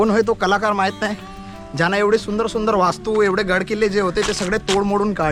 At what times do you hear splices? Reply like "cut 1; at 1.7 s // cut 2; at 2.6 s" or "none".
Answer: none